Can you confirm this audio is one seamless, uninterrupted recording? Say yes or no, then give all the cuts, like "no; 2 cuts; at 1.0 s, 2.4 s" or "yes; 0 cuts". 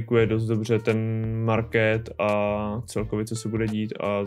yes; 0 cuts